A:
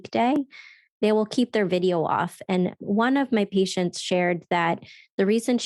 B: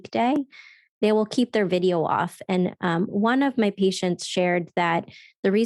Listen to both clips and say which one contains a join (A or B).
A